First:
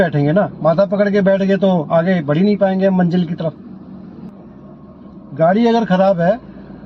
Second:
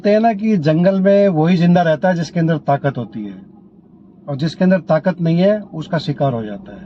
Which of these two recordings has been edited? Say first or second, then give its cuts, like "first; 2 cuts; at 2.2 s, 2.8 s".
first; 1 cut; at 4.3 s